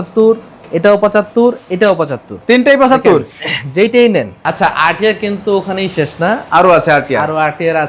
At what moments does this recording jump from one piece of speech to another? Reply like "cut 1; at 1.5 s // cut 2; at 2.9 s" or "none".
cut 1; at 4.4 s